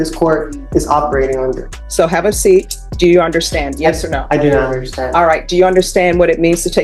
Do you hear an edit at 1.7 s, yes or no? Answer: yes